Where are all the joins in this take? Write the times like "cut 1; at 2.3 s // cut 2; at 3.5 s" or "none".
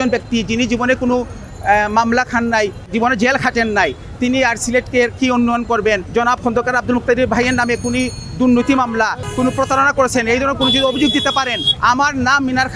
cut 1; at 2.9 s // cut 2; at 6.0 s // cut 3; at 9.2 s // cut 4; at 11.6 s